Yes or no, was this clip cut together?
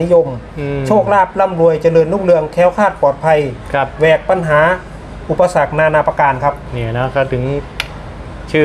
no